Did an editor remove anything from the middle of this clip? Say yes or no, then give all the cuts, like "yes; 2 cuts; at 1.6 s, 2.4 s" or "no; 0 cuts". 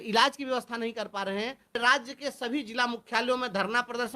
yes; 1 cut; at 1.8 s